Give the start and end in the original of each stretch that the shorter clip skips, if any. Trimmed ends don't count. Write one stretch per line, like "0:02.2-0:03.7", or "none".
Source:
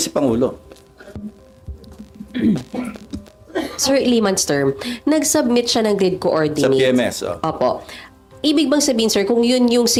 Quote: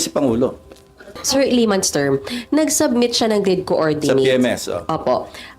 0:01.2-0:03.7